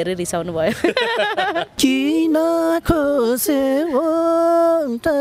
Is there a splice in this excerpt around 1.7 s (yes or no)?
yes